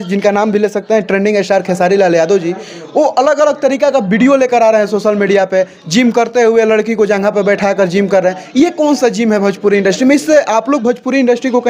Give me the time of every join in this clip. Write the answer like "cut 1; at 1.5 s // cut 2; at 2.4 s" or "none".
none